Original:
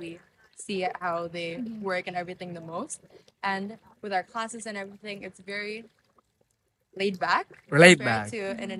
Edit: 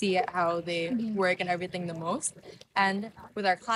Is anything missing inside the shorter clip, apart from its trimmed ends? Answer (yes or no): no